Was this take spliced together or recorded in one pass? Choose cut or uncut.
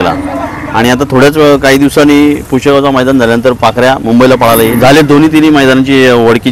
cut